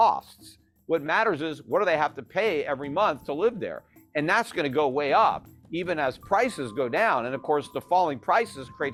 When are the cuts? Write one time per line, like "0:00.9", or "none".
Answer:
none

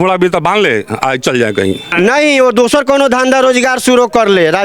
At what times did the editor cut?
0:01.9

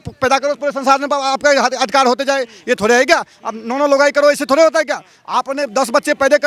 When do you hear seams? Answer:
none

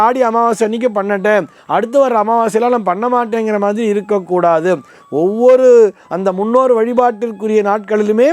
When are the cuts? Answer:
none

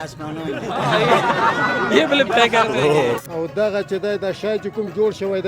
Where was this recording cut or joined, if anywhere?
0:03.3

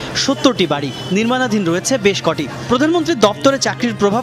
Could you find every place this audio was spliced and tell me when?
0:02.5

